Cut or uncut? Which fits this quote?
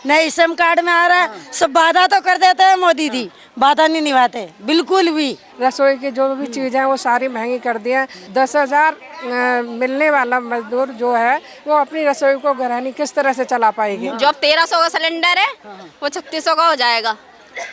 cut